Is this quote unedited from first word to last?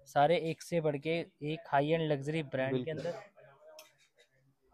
yes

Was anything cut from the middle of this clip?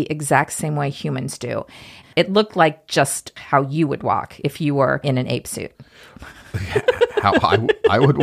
yes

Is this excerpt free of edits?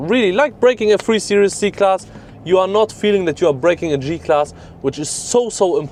yes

